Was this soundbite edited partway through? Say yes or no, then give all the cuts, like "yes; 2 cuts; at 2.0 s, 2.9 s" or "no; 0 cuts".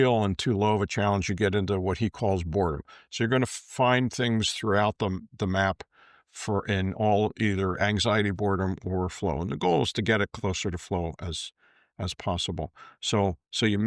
no; 0 cuts